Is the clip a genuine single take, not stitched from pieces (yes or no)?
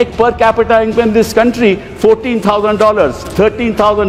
yes